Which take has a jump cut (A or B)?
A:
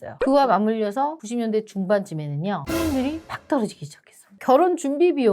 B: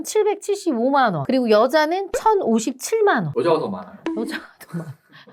A